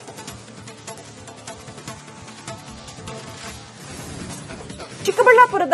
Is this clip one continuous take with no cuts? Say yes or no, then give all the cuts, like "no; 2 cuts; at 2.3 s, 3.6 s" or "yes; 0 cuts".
no; 1 cut; at 1.2 s